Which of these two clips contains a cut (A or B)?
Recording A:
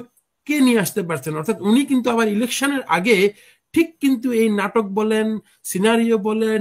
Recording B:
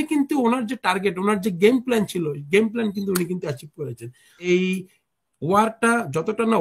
B